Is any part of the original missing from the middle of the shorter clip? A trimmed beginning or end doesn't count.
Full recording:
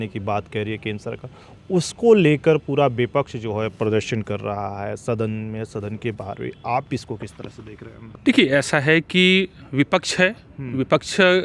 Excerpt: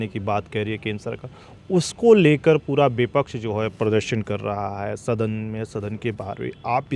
no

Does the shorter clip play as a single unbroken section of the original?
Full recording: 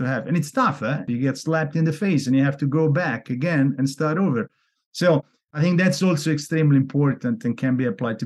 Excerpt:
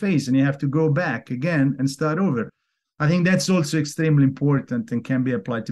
no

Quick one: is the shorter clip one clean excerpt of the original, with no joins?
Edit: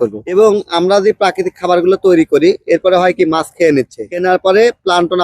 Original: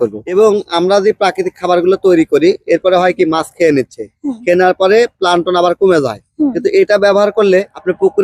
no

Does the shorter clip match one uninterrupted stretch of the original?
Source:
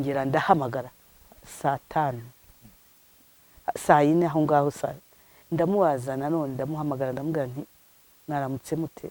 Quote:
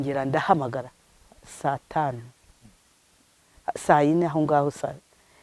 yes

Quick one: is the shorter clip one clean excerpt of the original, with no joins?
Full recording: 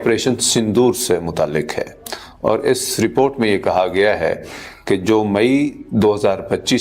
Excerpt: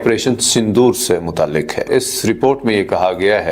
no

